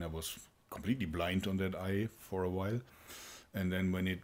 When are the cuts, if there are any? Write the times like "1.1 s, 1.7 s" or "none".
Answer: none